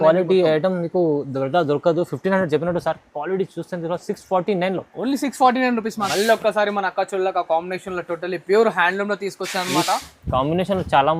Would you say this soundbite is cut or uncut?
cut